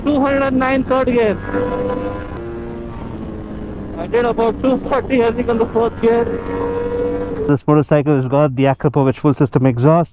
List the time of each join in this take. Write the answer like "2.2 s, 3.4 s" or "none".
2.4 s, 7.5 s